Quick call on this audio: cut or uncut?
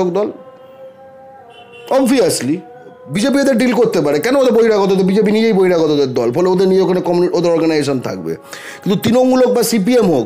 cut